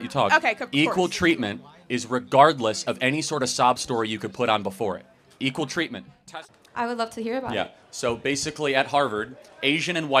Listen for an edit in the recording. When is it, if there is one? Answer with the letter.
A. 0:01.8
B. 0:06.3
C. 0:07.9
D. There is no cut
B